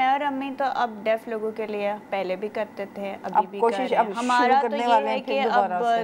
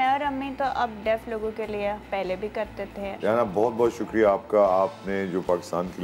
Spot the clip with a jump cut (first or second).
second